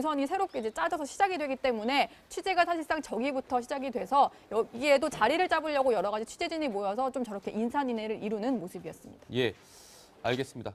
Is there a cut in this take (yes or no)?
no